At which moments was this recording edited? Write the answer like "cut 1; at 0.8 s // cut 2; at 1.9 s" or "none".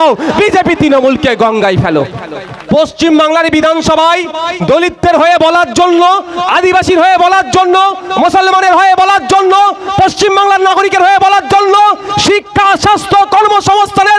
cut 1; at 2.6 s